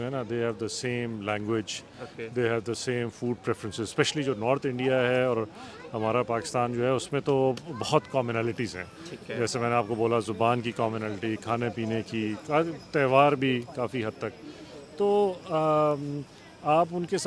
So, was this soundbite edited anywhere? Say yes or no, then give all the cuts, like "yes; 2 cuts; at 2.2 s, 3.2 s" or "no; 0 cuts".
no; 0 cuts